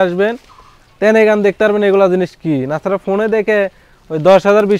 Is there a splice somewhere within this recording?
no; 0 cuts

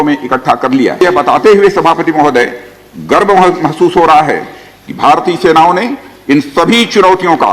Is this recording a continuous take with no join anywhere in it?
no; 1 cut; at 1.0 s

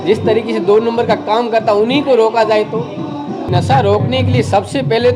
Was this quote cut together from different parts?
yes; 1 cut; at 3.5 s

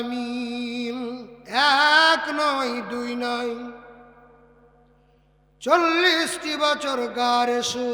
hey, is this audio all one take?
no; 1 cut; at 1.3 s

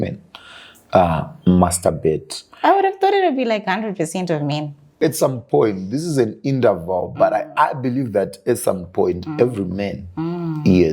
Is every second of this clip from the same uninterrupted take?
no; 1 cut; at 4.9 s

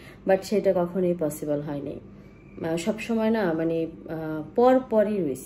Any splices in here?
no; 0 cuts

